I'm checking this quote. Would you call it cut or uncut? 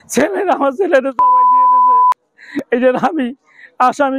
uncut